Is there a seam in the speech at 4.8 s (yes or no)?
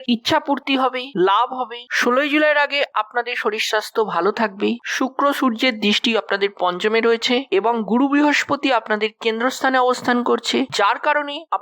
yes